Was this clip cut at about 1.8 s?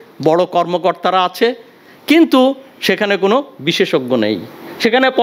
no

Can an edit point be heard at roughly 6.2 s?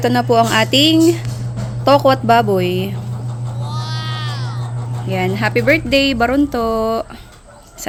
no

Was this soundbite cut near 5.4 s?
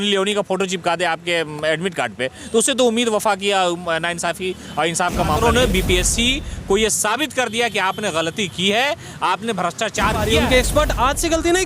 yes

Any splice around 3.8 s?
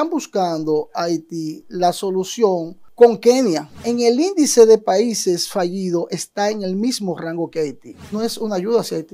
yes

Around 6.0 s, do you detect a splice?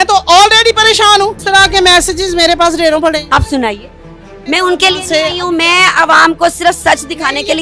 no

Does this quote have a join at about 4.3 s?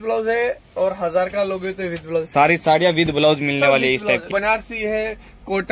yes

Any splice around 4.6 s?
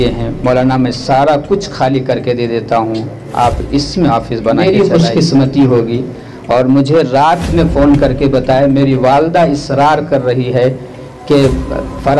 yes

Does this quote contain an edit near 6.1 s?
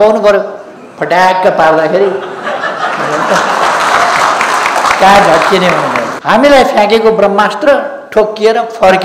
yes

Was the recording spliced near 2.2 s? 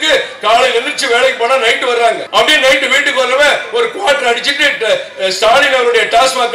yes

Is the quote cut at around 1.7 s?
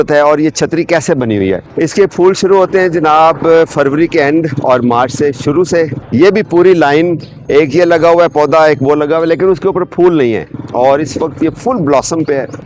yes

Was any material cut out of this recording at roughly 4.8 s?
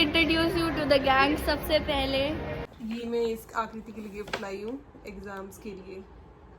no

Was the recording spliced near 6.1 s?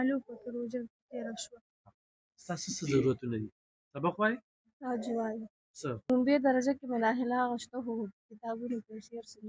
yes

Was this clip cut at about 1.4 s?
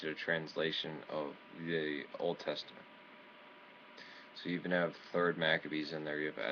no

